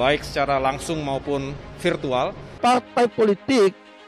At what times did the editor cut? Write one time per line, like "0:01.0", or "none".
0:02.4